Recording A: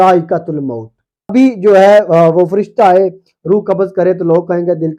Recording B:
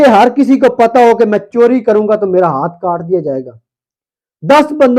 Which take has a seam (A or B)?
A